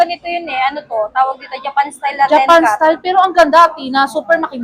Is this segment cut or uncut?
uncut